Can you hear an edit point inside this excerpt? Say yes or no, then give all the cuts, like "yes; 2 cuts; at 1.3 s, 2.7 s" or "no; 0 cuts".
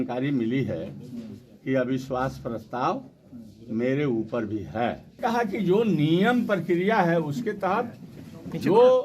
yes; 1 cut; at 5.1 s